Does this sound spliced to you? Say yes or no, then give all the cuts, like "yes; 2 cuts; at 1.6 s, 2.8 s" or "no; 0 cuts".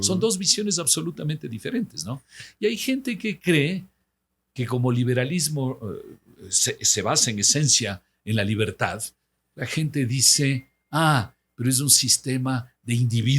no; 0 cuts